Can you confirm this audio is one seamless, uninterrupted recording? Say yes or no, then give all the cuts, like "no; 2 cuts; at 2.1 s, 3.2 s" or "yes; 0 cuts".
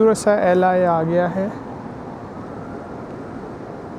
yes; 0 cuts